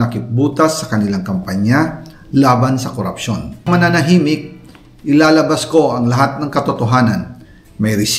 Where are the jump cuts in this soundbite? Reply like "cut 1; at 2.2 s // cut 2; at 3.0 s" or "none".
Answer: cut 1; at 3.7 s